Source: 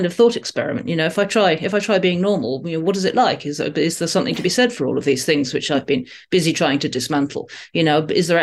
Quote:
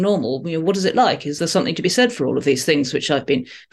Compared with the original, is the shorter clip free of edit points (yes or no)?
no